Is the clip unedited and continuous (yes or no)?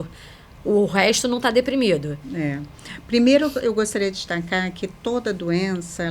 yes